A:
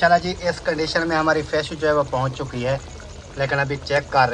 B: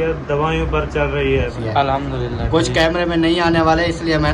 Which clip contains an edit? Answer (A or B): B